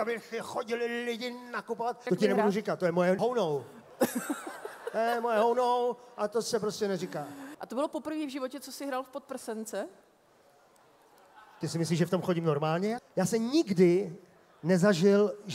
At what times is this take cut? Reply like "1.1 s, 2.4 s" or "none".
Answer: 2.0 s, 3.2 s, 7.4 s, 13.0 s